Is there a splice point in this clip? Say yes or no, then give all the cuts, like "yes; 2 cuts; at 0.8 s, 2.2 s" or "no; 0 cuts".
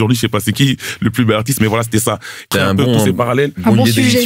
yes; 1 cut; at 2.5 s